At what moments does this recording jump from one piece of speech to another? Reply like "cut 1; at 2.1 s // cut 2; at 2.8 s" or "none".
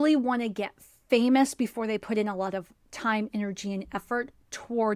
cut 1; at 1.0 s